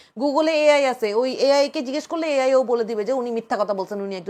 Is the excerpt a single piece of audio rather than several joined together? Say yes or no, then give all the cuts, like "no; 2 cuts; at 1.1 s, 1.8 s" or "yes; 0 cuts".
yes; 0 cuts